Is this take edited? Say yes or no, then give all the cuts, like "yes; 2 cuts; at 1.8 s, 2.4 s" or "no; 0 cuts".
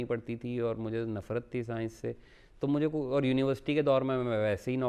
no; 0 cuts